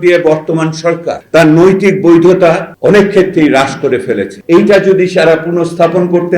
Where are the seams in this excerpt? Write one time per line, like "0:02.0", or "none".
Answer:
0:01.1
0:02.7
0:04.3